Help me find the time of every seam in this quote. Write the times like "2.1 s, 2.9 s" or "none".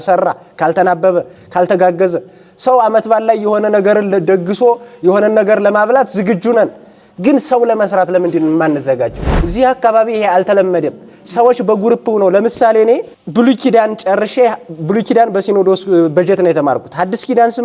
9.2 s, 13.2 s